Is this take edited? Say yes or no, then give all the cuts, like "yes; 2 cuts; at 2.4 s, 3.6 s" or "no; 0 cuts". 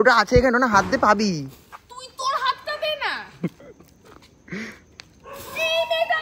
no; 0 cuts